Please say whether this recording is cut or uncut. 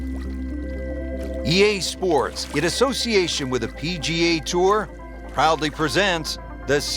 cut